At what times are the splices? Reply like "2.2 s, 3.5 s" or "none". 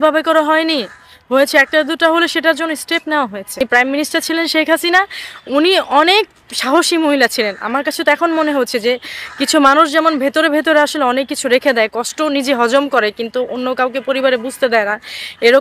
3.6 s